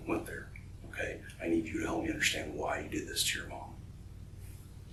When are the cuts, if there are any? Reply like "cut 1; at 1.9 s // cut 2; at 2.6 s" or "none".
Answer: none

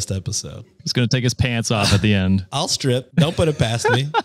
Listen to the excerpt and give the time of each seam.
cut 1; at 0.9 s // cut 2; at 2.8 s

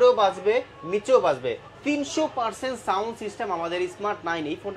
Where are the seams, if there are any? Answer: none

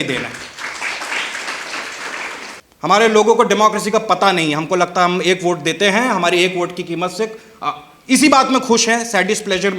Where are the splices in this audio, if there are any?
cut 1; at 2.6 s

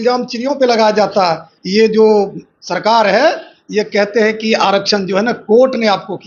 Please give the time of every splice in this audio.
none

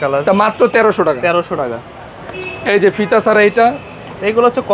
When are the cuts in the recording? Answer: none

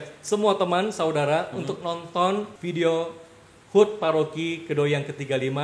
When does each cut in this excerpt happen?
cut 1; at 2.6 s

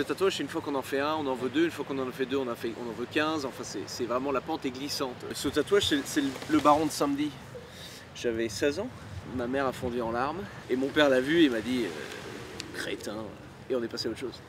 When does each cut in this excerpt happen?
cut 1; at 5.2 s // cut 2; at 9.2 s // cut 3; at 10.5 s // cut 4; at 13.5 s

